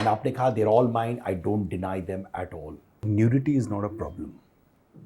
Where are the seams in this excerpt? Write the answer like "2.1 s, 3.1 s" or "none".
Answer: 3.0 s